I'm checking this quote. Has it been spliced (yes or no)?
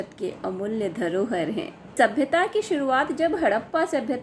yes